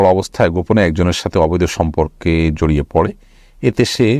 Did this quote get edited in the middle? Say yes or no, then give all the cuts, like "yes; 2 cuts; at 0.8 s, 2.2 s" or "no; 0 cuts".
no; 0 cuts